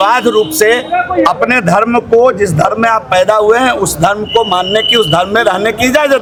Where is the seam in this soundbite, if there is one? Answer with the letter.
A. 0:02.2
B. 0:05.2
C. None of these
C